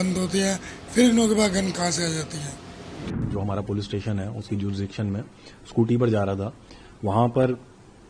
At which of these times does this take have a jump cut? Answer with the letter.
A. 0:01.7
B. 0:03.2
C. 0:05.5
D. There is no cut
B